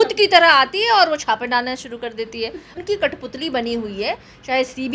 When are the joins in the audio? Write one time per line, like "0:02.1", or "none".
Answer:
0:02.7